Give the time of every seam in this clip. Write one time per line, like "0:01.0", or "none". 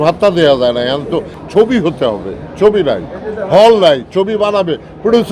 0:01.3